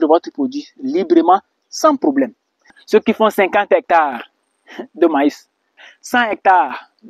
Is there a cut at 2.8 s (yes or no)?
yes